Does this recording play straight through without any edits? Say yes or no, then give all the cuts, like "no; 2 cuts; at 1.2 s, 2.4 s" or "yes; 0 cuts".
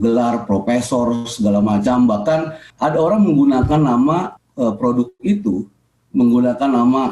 no; 2 cuts; at 2.6 s, 4.4 s